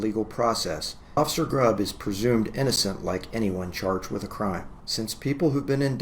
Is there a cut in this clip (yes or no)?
yes